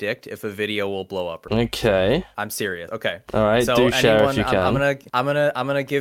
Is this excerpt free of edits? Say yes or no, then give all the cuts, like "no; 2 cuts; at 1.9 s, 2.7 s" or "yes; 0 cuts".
yes; 0 cuts